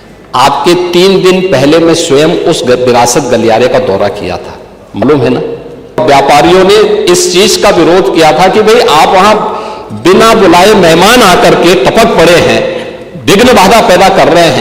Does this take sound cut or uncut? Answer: cut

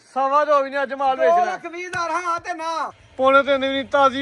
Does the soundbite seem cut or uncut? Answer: cut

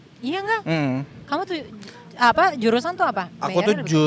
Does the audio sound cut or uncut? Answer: uncut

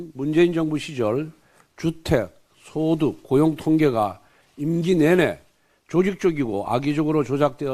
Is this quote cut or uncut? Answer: uncut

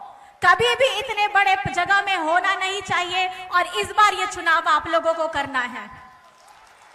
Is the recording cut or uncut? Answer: uncut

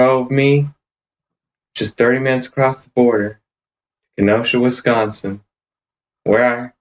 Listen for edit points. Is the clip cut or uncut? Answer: uncut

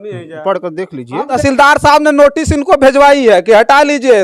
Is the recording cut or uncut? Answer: cut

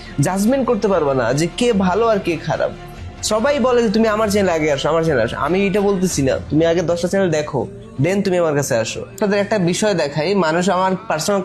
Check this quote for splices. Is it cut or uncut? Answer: cut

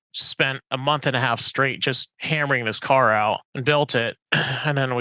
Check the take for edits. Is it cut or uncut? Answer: cut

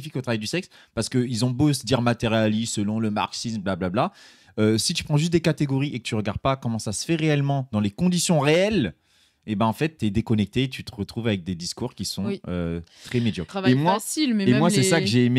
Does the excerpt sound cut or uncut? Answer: cut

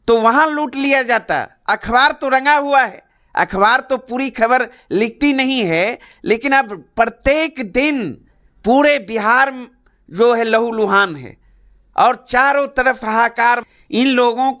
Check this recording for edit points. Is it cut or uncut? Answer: cut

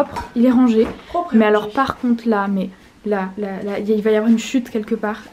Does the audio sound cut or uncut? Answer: uncut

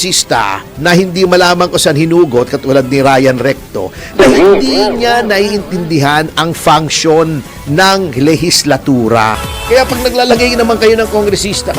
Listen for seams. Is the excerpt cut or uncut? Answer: cut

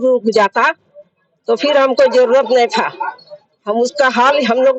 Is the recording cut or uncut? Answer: uncut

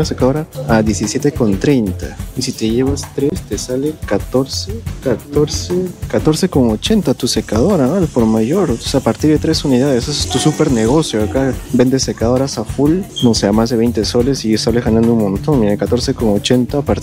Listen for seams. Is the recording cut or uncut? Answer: uncut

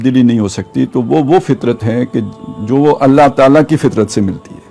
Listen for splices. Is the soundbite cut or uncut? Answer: uncut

